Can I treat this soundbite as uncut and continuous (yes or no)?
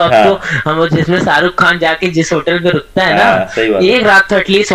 yes